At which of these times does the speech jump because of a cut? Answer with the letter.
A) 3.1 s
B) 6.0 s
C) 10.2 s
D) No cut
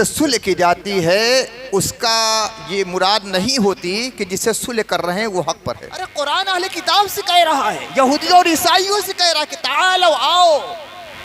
B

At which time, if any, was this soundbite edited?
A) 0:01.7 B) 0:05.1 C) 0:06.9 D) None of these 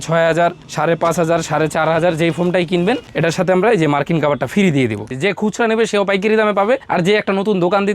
B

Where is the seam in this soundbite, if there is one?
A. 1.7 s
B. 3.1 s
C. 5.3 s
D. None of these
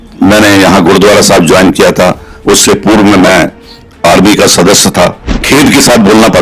C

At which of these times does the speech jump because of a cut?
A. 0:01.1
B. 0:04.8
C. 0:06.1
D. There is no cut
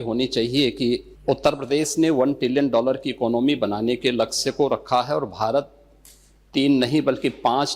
A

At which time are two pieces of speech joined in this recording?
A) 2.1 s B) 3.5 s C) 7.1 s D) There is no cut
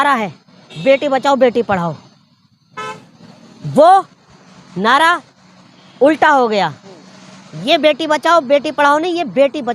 D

